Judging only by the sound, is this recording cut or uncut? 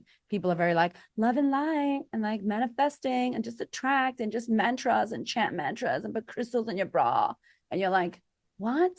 uncut